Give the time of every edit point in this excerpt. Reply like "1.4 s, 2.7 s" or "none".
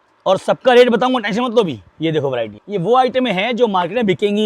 2.6 s

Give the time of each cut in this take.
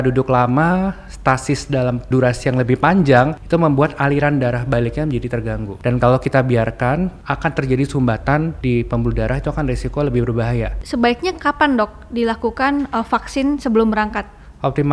2.1 s, 3.4 s, 5.7 s, 7.2 s, 8.6 s, 10.8 s

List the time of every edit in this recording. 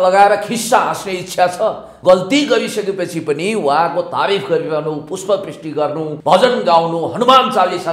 1.9 s, 6.1 s

